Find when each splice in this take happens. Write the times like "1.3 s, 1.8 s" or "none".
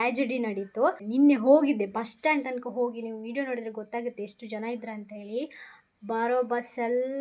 1.0 s